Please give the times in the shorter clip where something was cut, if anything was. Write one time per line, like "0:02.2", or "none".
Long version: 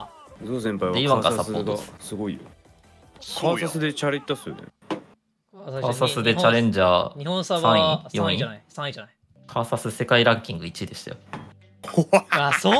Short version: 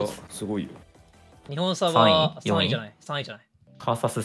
0:01.5